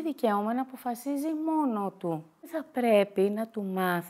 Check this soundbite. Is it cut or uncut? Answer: cut